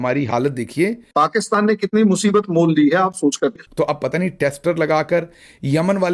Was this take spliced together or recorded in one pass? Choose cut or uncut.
cut